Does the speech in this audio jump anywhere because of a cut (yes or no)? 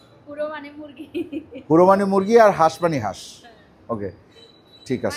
no